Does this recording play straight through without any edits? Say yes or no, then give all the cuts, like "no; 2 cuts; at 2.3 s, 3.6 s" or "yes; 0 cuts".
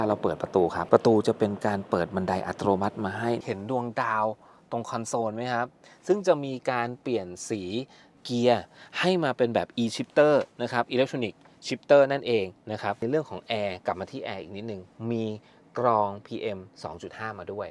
no; 3 cuts; at 3.4 s, 8.1 s, 13.0 s